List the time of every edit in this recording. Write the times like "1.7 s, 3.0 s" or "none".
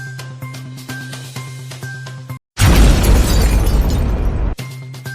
2.4 s